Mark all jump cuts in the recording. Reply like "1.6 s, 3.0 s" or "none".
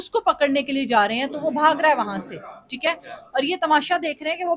none